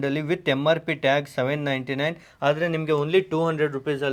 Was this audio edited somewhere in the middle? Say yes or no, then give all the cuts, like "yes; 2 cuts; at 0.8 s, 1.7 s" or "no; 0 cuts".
no; 0 cuts